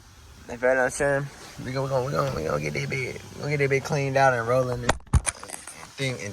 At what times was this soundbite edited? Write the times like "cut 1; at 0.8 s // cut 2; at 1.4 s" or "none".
cut 1; at 5.3 s